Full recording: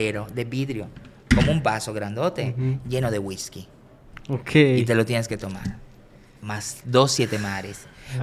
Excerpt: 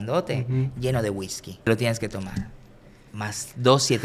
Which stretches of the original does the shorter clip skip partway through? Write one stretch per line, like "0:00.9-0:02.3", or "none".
0:03.8-0:05.0